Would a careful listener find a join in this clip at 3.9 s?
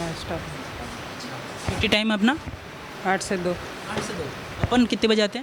no; 0 cuts

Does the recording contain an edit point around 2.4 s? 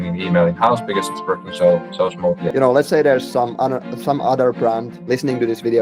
yes; 2 cuts; at 2.4 s, 4.9 s

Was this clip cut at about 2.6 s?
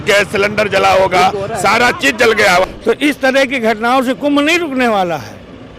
yes; 1 cut; at 2.6 s

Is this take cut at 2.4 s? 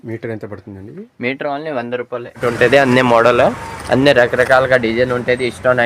yes; 1 cut; at 2.4 s

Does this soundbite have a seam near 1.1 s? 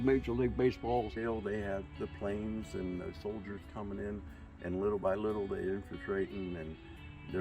yes; 1 cut; at 1.1 s

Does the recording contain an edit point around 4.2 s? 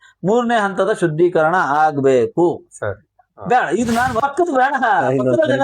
yes; 1 cut; at 4.2 s

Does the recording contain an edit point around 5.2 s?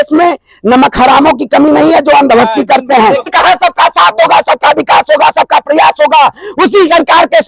no; 1 cut; at 3.3 s

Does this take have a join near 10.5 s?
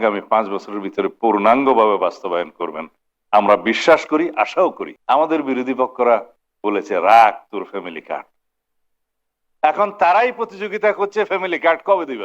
no; 1 cut; at 4.9 s

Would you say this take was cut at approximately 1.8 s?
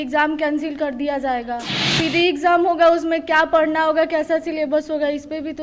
yes; 1 cut; at 1.8 s

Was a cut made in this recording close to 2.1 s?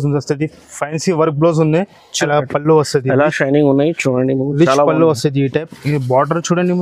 yes; 1 cut; at 2.1 s

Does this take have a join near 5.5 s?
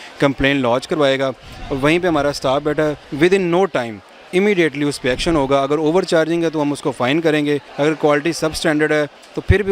no; 2 cuts; at 3.0 s, 7.7 s

